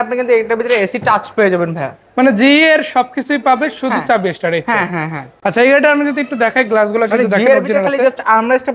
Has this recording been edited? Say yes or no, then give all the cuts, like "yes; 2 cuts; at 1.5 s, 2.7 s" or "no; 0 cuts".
no; 0 cuts